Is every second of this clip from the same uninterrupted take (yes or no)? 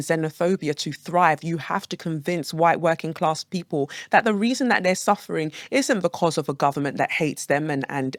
yes